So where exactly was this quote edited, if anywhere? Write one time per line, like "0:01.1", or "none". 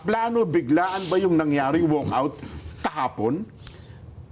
none